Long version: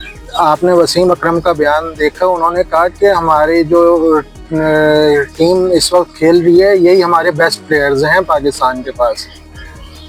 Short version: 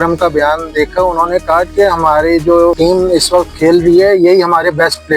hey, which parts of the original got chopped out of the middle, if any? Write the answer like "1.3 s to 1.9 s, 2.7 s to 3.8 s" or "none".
4.0 s to 5.3 s